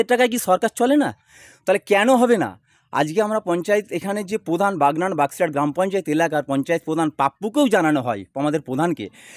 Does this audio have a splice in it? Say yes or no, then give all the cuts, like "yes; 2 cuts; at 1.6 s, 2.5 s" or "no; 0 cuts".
no; 0 cuts